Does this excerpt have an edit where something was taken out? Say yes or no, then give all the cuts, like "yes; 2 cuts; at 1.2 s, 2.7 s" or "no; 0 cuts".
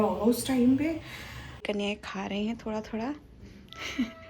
yes; 1 cut; at 1.4 s